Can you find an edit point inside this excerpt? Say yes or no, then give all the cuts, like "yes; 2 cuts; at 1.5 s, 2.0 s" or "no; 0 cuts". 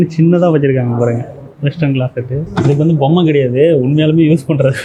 no; 0 cuts